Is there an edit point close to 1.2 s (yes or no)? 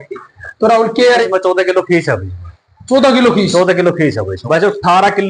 yes